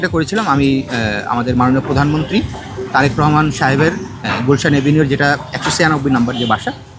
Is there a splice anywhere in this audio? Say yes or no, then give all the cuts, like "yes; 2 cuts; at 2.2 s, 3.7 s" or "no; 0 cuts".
no; 0 cuts